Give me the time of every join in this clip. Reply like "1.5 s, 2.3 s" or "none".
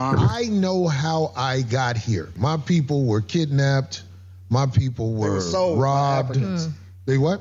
none